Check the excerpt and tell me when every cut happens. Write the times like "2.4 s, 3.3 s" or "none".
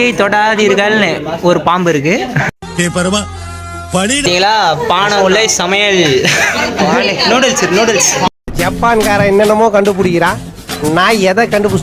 4.2 s